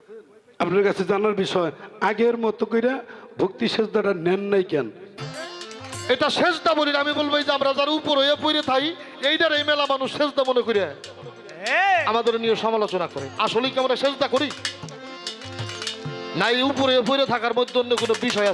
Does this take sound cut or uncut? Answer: cut